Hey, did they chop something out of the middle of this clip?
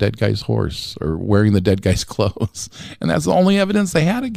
no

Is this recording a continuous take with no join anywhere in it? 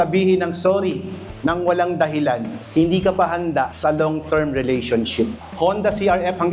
no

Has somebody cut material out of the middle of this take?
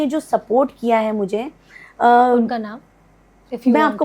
no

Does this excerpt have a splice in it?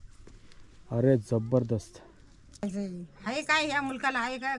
yes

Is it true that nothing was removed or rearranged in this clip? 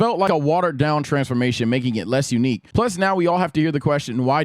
no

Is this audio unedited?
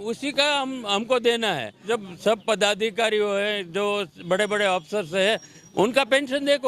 no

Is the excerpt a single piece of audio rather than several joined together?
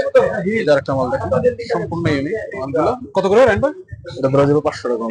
yes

